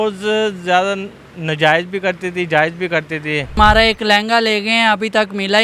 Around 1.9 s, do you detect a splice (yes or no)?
no